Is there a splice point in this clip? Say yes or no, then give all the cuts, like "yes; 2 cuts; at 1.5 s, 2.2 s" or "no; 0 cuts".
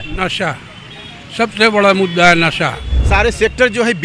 yes; 1 cut; at 2.9 s